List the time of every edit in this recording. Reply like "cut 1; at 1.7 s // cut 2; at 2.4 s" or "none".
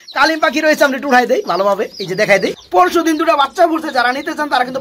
cut 1; at 2.6 s